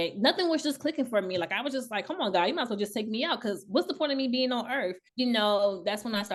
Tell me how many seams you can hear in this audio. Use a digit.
0